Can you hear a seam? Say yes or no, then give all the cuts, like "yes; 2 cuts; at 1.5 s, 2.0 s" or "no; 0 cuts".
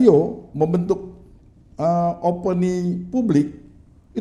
no; 0 cuts